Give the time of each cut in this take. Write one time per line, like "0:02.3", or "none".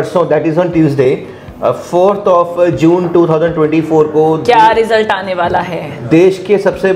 none